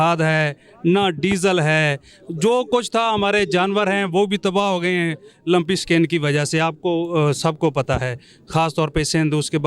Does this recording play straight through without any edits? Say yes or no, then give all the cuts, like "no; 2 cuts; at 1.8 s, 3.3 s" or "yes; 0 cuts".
yes; 0 cuts